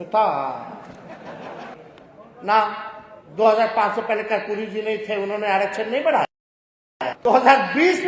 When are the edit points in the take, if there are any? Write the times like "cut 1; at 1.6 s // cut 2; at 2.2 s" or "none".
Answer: cut 1; at 1.7 s